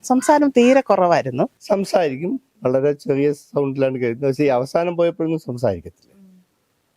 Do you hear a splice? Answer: yes; 1 cut; at 1.6 s

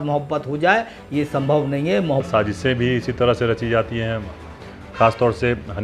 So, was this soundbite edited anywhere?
yes; 1 cut; at 2.3 s

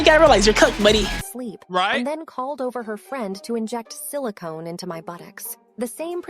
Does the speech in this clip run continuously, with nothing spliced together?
no; 1 cut; at 1.2 s

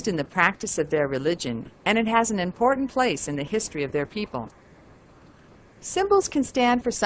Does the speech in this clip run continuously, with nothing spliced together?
yes; 0 cuts

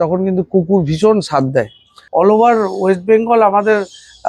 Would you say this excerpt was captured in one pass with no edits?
no; 1 cut; at 2.0 s

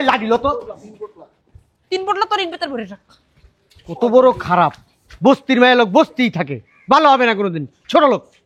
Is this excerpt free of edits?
yes; 0 cuts

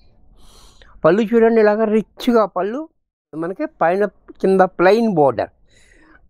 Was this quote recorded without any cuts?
no; 1 cut; at 3.5 s

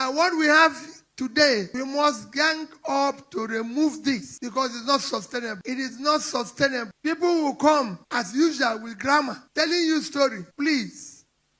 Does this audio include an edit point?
yes; 7 cuts; at 1.7 s, 4.3 s, 5.6 s, 6.9 s, 8.0 s, 9.4 s, 10.4 s

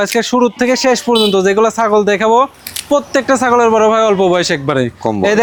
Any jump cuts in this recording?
no; 0 cuts

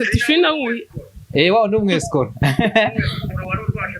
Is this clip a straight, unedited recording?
yes; 0 cuts

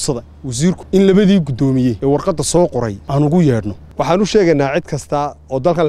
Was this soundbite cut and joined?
yes; 4 cuts; at 0.8 s, 2.0 s, 3.0 s, 3.8 s

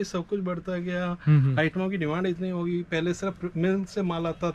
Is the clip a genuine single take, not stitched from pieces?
yes; 0 cuts

